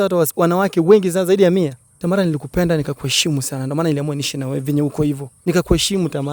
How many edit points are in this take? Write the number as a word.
two